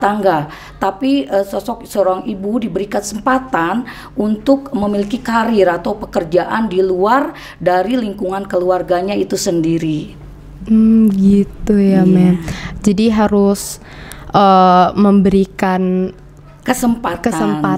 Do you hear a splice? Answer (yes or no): no